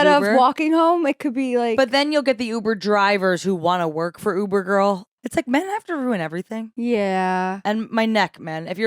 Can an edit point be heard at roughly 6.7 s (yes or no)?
no